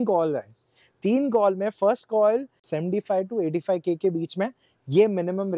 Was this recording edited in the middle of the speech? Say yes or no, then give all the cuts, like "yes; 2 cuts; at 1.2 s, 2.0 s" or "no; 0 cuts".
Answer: yes; 1 cut; at 2.7 s